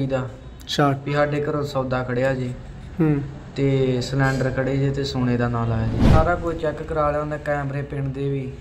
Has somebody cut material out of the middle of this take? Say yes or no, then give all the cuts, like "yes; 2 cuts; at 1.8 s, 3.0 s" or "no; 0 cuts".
yes; 1 cut; at 6.1 s